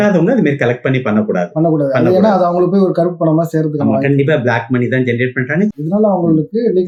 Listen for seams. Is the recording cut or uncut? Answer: uncut